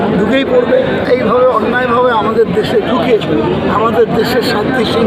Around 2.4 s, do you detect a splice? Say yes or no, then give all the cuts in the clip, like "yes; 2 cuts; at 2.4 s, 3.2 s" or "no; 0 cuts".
no; 1 cut; at 1.0 s